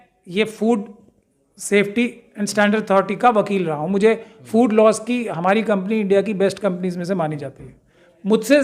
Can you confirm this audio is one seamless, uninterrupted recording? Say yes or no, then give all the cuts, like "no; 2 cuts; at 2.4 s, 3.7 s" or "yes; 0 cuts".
yes; 0 cuts